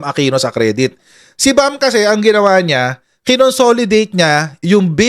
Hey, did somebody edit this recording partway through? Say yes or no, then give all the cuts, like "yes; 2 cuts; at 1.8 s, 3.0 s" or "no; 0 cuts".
no; 0 cuts